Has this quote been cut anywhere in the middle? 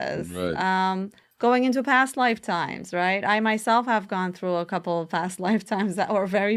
no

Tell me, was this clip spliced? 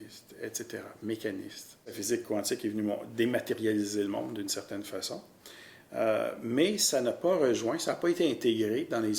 yes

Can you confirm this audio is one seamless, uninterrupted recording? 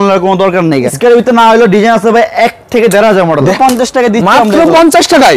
no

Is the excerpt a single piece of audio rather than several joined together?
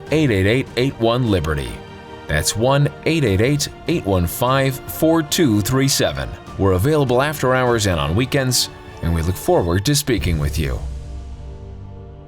no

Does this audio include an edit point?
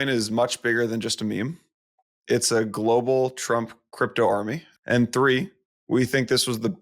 yes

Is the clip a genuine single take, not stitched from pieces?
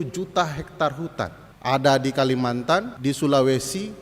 no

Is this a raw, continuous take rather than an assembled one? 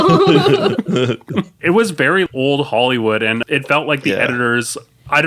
no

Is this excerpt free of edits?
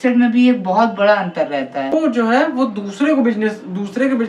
no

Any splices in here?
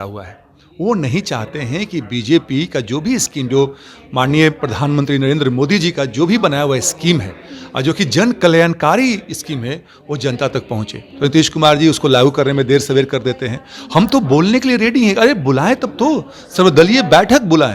no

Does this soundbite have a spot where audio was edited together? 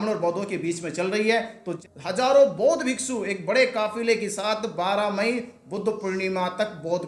yes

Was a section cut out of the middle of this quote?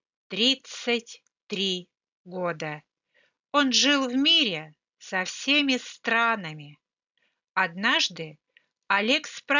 no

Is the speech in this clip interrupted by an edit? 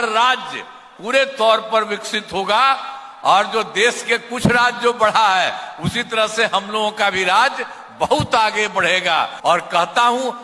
yes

